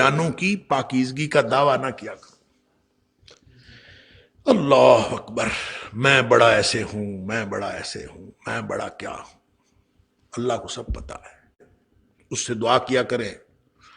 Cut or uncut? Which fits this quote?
cut